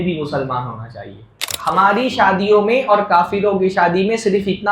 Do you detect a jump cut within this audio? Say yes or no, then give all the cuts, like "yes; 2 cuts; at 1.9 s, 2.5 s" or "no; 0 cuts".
yes; 1 cut; at 1.6 s